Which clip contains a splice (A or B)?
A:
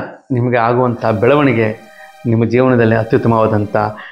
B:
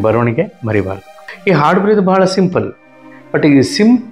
B